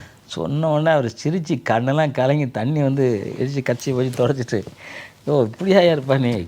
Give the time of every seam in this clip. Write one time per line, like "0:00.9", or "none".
none